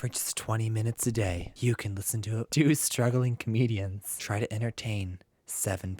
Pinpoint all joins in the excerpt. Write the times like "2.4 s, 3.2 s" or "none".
1.5 s, 2.5 s, 4.1 s